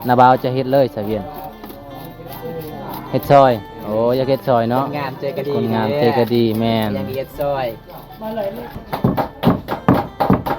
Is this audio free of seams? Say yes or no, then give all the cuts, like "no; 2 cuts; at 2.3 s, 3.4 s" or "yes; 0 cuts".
no; 1 cut; at 8.8 s